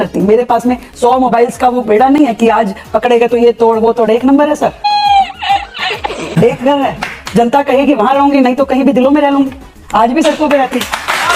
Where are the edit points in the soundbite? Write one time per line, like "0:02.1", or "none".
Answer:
none